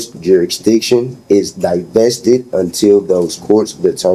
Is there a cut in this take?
no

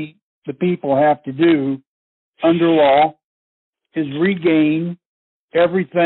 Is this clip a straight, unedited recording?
yes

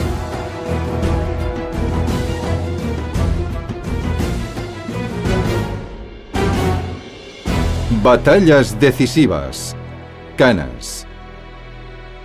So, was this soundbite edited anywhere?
no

